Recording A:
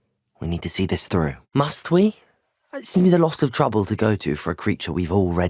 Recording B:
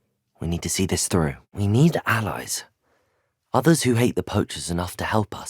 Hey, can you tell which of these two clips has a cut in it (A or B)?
A